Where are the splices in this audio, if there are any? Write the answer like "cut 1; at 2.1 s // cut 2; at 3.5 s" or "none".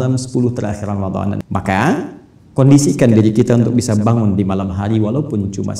cut 1; at 1.4 s